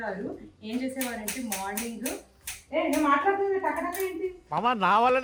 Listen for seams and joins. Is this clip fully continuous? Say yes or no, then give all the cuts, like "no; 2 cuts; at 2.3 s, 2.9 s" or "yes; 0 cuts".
yes; 0 cuts